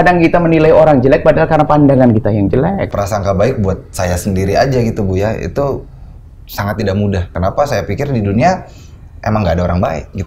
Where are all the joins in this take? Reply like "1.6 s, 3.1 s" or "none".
2.9 s, 7.3 s